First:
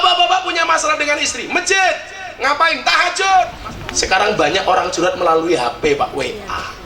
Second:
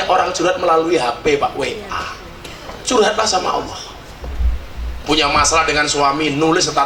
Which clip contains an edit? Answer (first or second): first